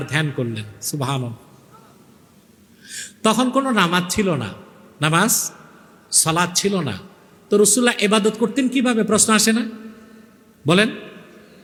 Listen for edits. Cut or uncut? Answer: uncut